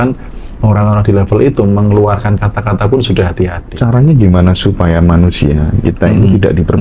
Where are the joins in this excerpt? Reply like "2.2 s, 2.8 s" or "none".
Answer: 3.6 s